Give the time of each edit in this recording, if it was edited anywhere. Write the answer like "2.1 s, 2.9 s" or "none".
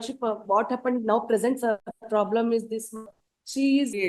1.9 s

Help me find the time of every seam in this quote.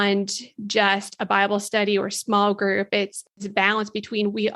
3.3 s

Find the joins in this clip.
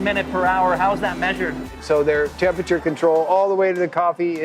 1.8 s

